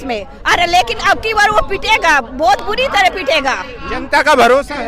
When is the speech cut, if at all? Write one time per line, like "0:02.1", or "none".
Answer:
none